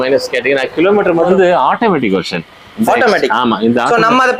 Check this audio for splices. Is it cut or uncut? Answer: cut